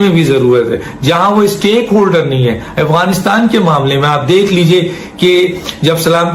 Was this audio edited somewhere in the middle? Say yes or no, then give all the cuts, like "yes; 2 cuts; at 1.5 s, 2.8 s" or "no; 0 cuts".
no; 0 cuts